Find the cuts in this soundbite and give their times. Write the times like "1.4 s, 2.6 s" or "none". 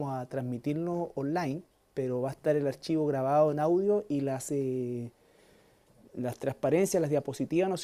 none